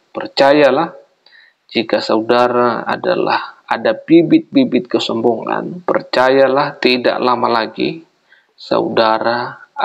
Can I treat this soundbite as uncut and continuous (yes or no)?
yes